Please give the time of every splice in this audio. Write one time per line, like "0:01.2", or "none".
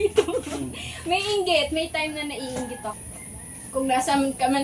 0:03.1